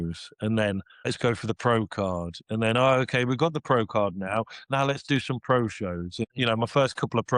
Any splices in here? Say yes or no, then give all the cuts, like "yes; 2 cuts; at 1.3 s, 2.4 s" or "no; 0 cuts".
yes; 2 cuts; at 1.1 s, 6.2 s